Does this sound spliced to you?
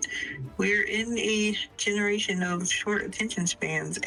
no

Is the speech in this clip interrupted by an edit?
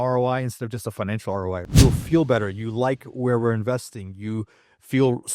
yes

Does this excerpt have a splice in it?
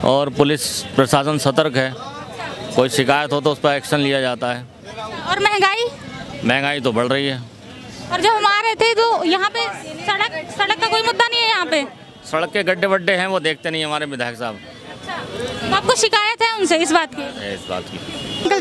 no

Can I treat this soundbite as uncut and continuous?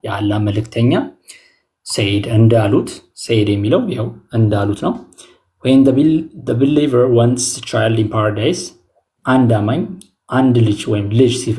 yes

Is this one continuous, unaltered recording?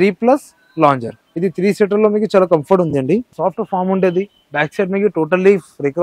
yes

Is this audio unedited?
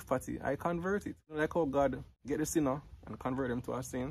no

